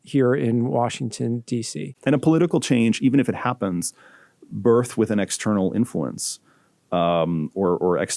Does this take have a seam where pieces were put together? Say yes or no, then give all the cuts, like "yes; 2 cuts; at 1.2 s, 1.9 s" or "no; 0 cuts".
yes; 1 cut; at 1.8 s